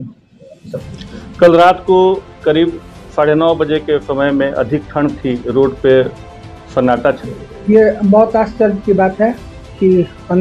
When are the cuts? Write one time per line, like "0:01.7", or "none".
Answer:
0:07.2